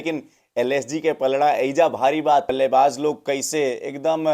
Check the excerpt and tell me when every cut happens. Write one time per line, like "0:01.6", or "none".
0:02.5